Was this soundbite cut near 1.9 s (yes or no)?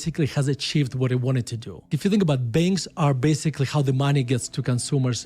yes